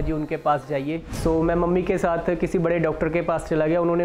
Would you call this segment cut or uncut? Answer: cut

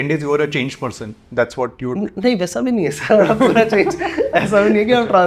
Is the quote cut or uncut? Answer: uncut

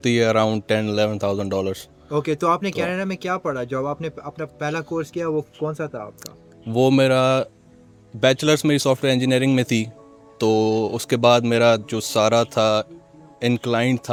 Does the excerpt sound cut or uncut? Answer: uncut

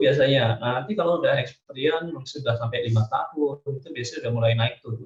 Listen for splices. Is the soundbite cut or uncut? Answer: uncut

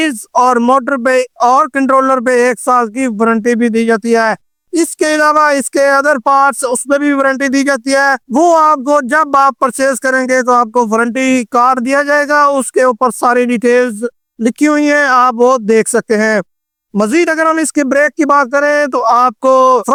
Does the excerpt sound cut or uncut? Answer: uncut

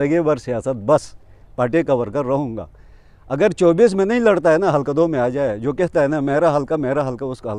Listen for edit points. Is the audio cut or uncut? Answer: uncut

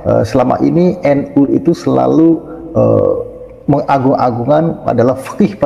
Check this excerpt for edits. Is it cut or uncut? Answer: uncut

